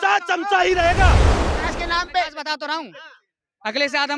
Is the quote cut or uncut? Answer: cut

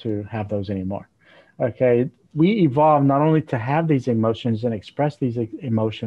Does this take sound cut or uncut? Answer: uncut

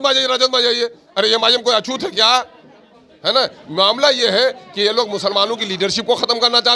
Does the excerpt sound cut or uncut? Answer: uncut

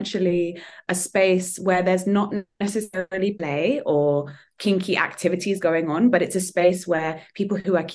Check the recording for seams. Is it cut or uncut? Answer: uncut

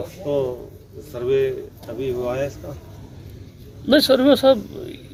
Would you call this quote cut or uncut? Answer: uncut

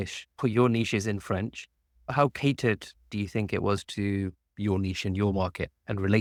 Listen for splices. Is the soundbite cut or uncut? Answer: uncut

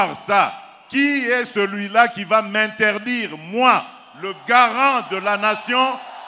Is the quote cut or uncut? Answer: uncut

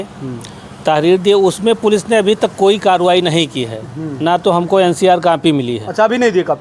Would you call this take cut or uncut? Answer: uncut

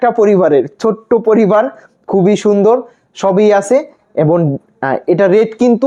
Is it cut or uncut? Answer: uncut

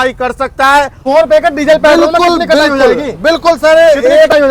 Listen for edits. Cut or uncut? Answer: cut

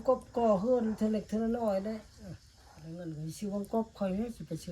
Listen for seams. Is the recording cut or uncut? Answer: cut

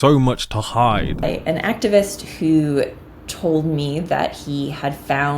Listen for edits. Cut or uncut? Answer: cut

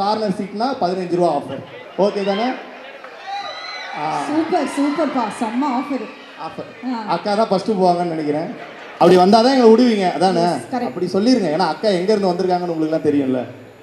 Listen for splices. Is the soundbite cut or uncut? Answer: cut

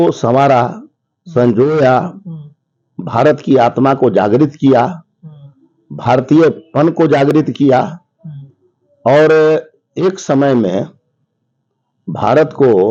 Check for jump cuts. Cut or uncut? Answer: uncut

